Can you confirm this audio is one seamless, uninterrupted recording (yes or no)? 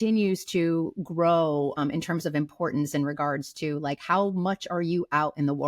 no